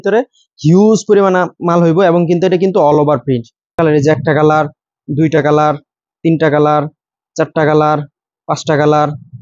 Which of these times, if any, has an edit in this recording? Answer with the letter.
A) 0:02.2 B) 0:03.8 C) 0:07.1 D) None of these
B